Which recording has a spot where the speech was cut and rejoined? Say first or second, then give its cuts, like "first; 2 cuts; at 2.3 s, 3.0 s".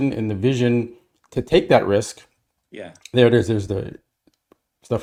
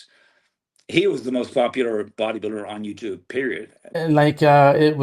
second; 1 cut; at 3.9 s